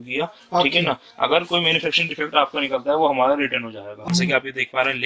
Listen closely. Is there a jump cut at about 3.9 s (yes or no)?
yes